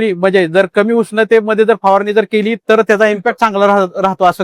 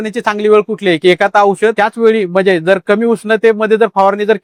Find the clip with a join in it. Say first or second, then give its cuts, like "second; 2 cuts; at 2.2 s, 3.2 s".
first; 1 cut; at 3.3 s